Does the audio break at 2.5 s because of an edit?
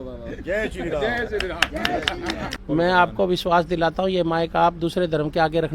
yes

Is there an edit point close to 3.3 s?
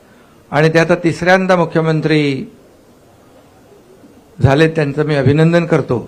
no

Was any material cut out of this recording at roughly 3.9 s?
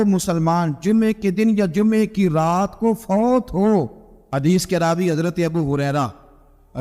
yes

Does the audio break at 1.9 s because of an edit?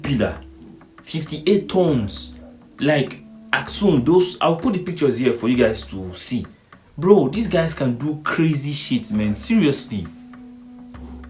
no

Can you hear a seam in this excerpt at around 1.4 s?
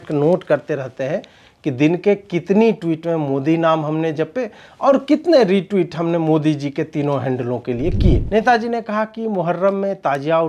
no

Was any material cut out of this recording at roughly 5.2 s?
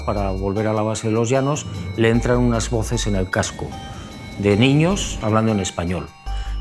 yes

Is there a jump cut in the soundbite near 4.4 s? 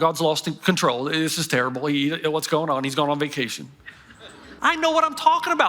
yes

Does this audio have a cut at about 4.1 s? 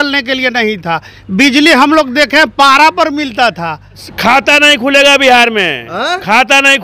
yes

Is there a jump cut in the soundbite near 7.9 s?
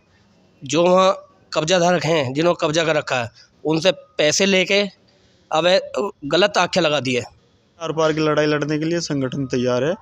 yes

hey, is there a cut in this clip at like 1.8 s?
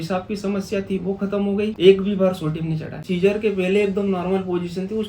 yes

